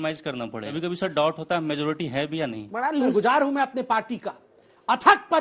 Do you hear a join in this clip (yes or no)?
yes